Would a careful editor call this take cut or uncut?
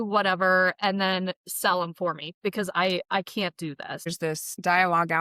cut